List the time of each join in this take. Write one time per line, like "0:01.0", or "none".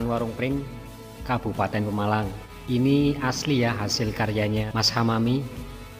0:02.5
0:04.7